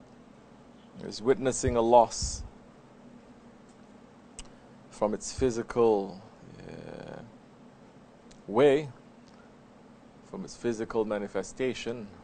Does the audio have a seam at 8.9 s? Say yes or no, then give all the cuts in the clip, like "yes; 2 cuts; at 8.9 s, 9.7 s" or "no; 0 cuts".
no; 1 cut; at 10.7 s